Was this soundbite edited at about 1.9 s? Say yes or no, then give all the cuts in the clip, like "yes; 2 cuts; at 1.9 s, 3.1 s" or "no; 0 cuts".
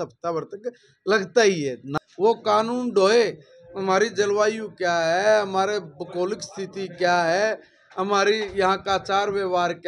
yes; 1 cut; at 1.9 s